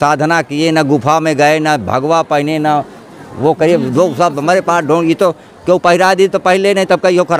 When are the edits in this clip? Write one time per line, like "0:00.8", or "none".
none